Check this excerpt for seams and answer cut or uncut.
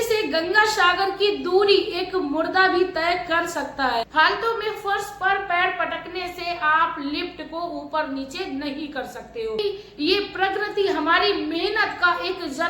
cut